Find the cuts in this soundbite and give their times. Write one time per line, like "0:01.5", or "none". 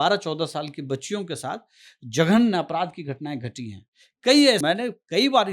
0:04.6